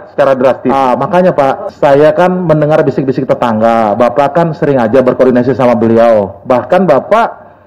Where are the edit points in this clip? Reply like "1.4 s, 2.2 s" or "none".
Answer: none